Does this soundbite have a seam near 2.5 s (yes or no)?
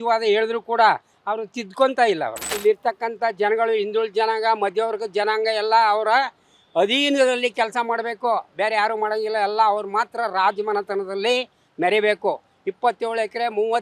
yes